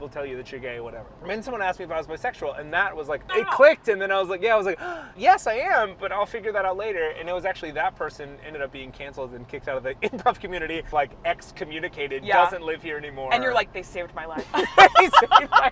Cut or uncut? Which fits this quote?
cut